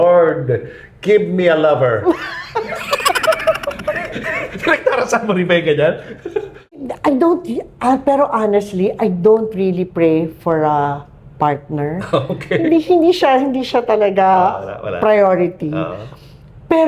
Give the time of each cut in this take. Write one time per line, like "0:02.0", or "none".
0:06.8